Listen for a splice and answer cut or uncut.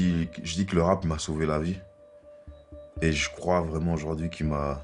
uncut